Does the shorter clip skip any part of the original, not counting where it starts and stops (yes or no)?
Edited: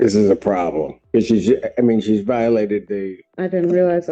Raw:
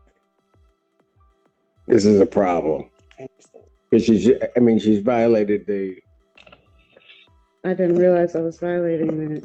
yes